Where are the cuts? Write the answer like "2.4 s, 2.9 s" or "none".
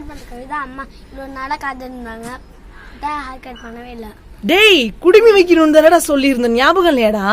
none